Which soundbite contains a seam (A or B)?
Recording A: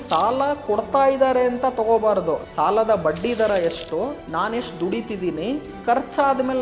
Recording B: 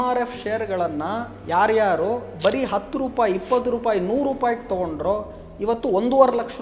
A